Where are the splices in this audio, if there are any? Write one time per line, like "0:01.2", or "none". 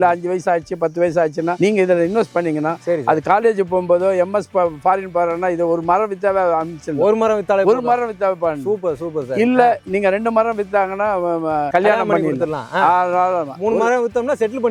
none